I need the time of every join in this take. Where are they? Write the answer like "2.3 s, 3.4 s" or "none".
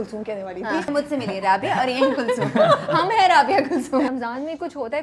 0.9 s, 4.1 s